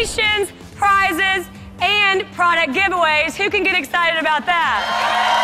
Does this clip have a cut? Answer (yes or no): no